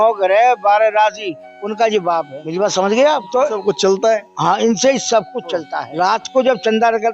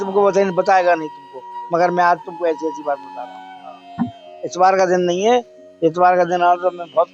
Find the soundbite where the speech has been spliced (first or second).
first